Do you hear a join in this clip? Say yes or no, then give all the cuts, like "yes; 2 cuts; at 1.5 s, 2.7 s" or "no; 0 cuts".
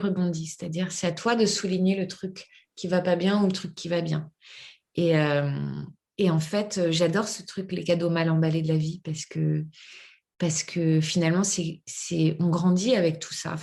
no; 0 cuts